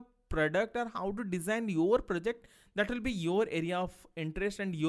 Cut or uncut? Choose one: uncut